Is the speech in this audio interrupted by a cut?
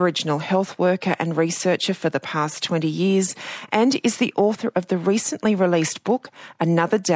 no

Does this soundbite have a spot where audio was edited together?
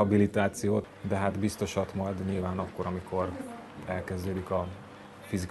no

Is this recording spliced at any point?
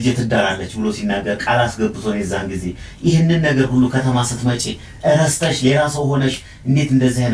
no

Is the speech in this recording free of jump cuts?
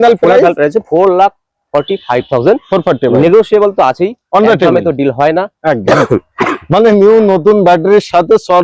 no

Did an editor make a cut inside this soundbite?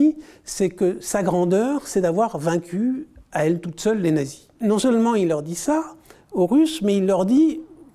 yes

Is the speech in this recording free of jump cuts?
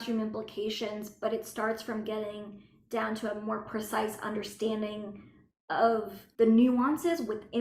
no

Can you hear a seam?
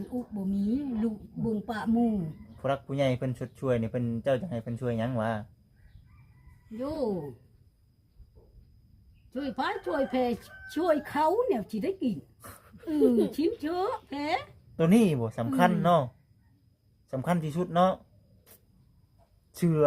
yes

